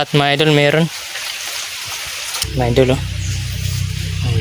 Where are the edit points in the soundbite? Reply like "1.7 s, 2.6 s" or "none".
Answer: 2.4 s